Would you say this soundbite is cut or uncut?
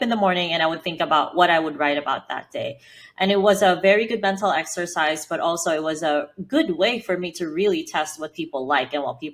uncut